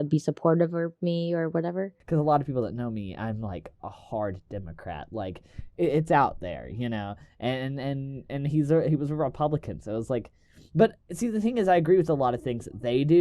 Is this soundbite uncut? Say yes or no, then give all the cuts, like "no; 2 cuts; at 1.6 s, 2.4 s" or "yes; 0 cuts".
no; 1 cut; at 2.0 s